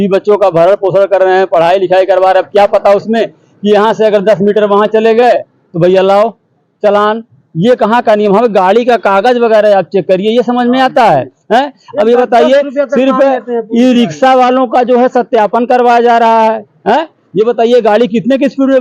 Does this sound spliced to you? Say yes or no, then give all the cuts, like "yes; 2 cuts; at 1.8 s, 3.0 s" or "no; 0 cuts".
no; 0 cuts